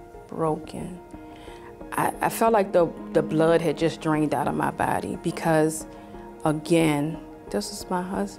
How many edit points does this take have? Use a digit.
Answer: 0